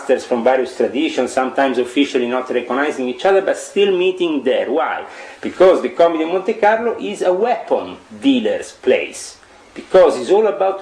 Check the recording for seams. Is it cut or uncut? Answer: uncut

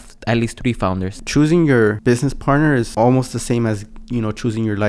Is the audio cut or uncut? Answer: cut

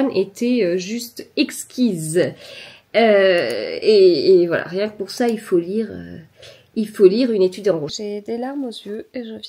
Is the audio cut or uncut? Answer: cut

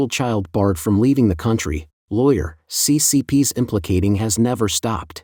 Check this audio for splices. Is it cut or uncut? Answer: uncut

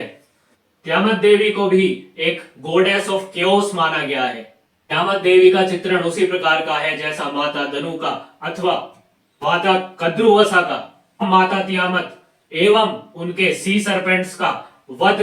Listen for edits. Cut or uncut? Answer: uncut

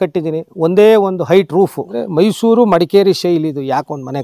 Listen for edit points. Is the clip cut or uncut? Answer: cut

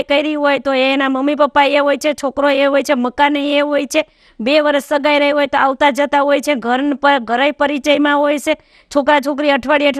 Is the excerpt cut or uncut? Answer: uncut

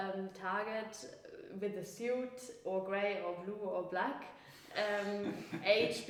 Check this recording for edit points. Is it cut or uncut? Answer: uncut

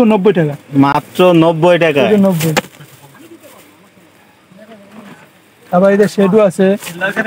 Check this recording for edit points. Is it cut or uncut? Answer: uncut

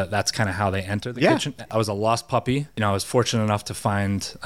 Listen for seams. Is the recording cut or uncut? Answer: cut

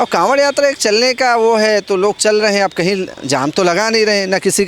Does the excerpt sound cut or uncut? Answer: uncut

